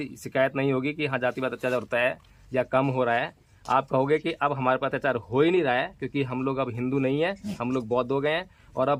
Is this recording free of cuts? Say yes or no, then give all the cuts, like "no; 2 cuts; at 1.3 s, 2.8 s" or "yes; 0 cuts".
yes; 0 cuts